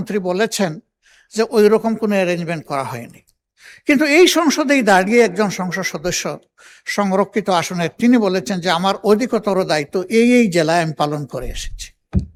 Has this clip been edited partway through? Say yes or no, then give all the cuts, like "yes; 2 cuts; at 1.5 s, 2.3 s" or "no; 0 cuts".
no; 0 cuts